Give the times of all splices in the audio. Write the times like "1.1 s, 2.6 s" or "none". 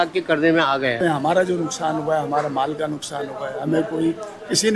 1.0 s

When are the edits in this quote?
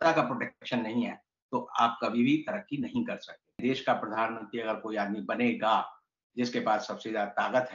3.6 s

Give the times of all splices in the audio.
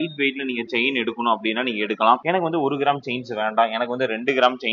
none

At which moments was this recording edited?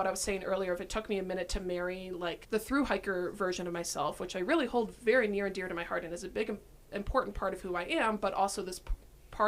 2.4 s

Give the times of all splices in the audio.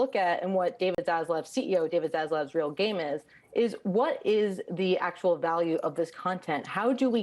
1.0 s

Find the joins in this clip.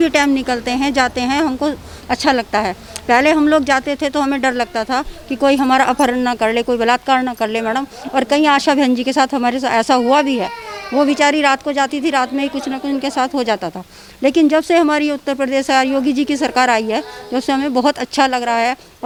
none

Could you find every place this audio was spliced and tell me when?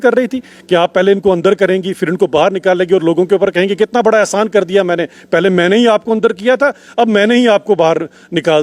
none

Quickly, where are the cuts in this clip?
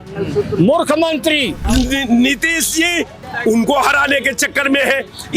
1.6 s, 3.2 s

